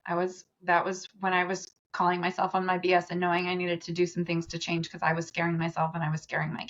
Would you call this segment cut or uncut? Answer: uncut